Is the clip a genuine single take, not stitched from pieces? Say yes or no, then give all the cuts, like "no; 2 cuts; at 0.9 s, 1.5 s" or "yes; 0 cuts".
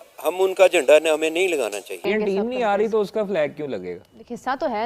no; 1 cut; at 2.0 s